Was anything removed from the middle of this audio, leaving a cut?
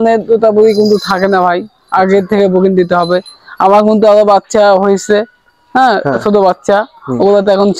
no; 0 cuts

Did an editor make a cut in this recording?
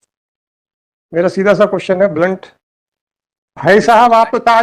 yes; 1 cut; at 3.6 s

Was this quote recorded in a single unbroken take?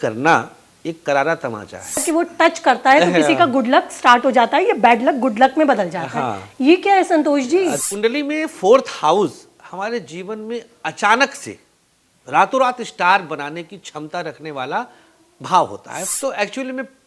no; 3 cuts; at 2.0 s, 7.8 s, 16.0 s

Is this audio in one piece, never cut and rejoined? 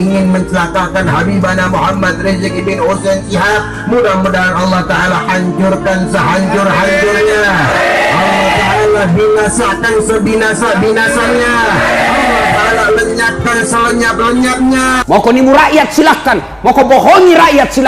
no; 1 cut; at 15.0 s

